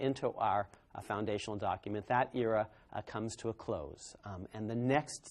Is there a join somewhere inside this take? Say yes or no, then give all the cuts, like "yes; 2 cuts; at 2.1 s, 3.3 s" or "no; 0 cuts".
yes; 1 cut; at 1.1 s